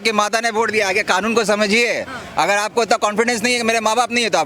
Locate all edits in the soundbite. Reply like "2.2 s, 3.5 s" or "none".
none